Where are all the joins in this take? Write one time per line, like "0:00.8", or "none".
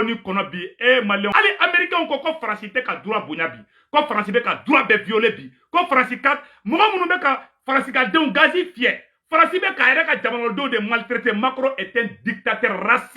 0:01.3